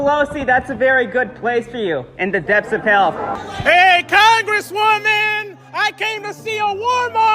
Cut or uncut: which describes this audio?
cut